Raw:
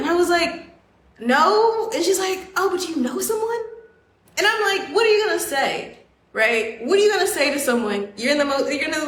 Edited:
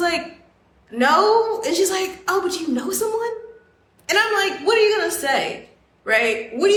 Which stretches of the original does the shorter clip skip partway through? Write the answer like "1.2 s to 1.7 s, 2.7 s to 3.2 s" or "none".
none